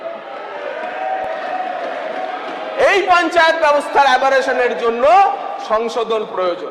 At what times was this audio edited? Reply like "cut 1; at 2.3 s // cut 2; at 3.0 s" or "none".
none